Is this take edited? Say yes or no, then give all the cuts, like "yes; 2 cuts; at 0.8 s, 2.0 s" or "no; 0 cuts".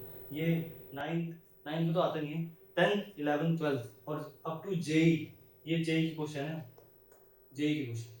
no; 0 cuts